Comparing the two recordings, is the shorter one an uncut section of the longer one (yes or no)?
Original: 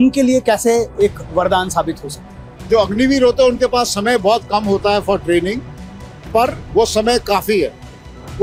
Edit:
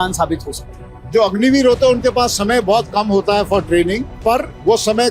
no